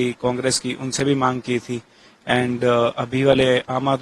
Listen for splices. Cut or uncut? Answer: uncut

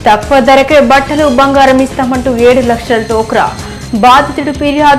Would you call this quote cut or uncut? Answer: uncut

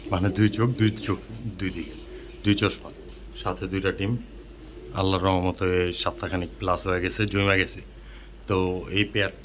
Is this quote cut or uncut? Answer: uncut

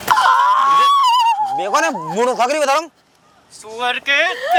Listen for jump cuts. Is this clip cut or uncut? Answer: uncut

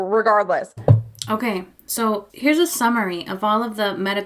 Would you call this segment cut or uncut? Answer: cut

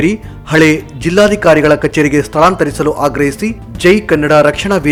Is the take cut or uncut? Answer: uncut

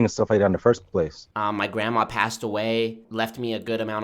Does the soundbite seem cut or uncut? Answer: cut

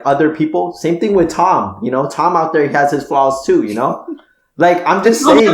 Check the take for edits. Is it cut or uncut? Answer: uncut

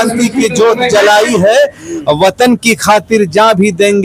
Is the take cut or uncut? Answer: uncut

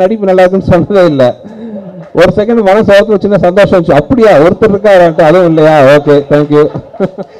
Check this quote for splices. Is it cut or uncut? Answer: uncut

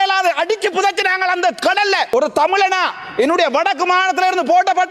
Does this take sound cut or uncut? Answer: cut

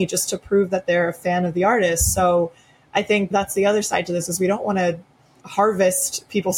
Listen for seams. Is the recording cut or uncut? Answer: uncut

